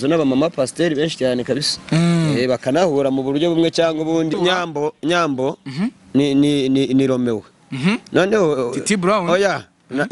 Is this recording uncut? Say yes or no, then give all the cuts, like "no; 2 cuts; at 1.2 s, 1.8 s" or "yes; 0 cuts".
no; 1 cut; at 4.3 s